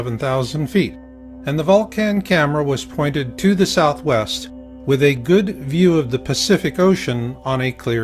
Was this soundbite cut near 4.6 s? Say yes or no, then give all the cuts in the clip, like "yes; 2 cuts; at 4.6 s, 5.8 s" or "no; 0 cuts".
no; 1 cut; at 6.6 s